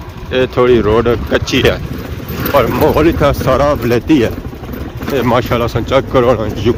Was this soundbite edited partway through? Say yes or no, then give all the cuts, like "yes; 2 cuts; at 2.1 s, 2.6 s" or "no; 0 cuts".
no; 0 cuts